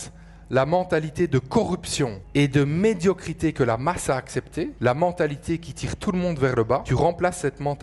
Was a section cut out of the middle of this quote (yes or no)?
yes